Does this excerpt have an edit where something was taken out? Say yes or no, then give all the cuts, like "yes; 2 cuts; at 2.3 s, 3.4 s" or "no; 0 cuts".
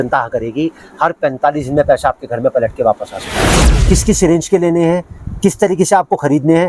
yes; 1 cut; at 3.6 s